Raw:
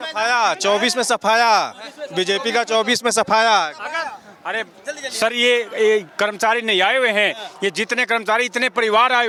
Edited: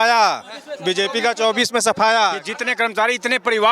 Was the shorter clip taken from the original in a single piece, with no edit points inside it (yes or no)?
no